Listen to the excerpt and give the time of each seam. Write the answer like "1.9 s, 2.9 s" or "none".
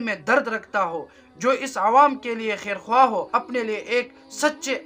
3.3 s